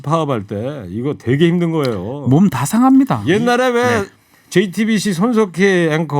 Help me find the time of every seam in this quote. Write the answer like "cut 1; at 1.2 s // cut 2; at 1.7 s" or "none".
cut 1; at 3.2 s